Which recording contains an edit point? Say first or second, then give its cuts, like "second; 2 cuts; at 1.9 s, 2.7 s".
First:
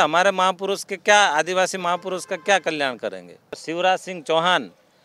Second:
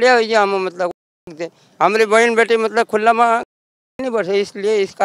first; 1 cut; at 3.6 s